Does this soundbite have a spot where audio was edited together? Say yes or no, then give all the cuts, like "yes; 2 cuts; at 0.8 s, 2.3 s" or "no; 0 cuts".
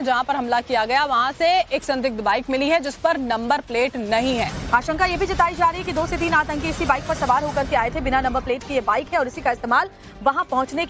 no; 0 cuts